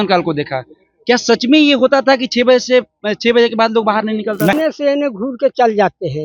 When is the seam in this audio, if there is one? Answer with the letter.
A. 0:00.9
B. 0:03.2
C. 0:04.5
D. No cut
C